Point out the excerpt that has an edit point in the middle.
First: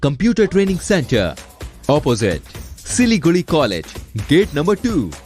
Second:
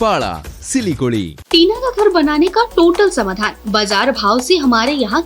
second; 1 cut; at 1.4 s

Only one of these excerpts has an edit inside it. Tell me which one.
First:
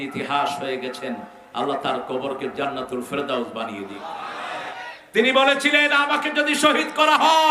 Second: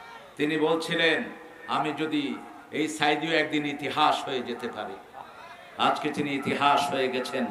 first; 1 cut; at 4.8 s

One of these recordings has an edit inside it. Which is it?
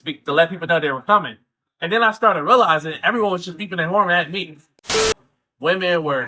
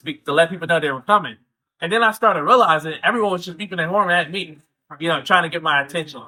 first; 1 cut; at 5.0 s

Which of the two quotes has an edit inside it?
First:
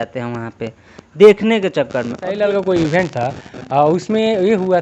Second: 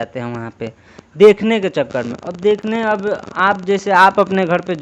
first; 1 cut; at 2.3 s

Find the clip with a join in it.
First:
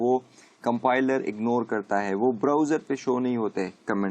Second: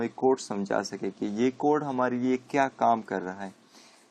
first; 1 cut; at 1.8 s

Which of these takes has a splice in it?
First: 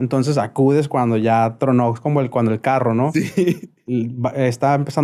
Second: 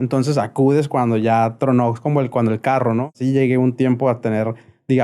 second; 1 cut; at 3.1 s

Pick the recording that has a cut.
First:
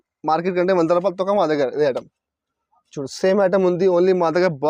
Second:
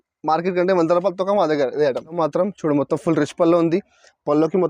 second; 1 cut; at 2.2 s

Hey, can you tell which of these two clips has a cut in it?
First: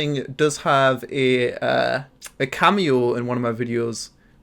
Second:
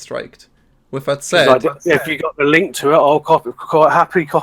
first; 1 cut; at 2.2 s

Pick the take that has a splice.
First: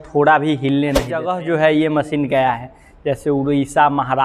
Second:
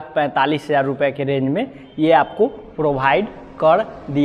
first; 1 cut; at 1.3 s

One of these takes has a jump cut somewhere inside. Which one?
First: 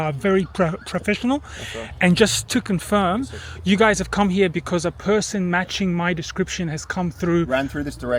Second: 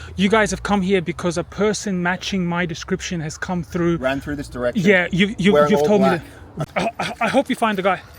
second; 1 cut; at 6.5 s

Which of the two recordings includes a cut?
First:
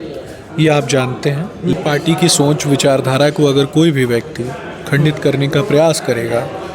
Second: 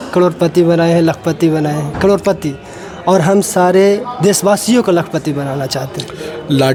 first; 1 cut; at 1.7 s

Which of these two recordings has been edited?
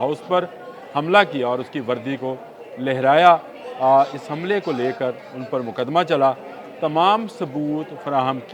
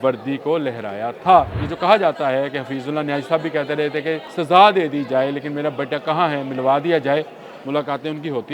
second; 2 cuts; at 1.6 s, 4.3 s

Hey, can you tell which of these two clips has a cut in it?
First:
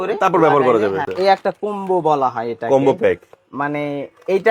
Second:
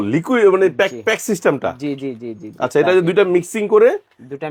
first; 1 cut; at 1.1 s

